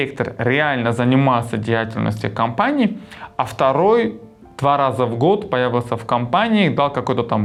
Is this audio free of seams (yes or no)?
yes